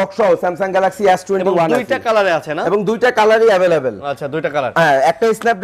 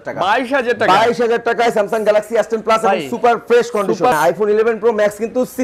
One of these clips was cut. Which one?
second; 1 cut; at 4.1 s

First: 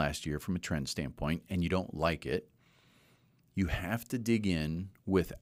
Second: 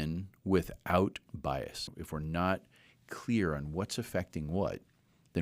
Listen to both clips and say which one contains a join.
second; 1 cut; at 1.9 s

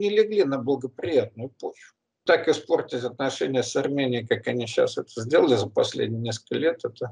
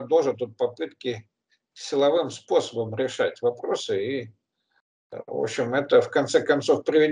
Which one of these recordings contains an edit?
first; 1 cut; at 2.2 s

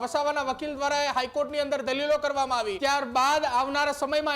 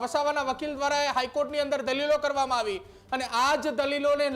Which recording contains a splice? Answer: first; 1 cut; at 2.7 s

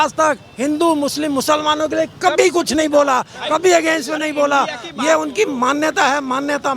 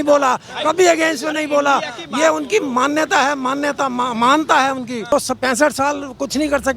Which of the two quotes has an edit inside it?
second; 1 cut; at 5.1 s

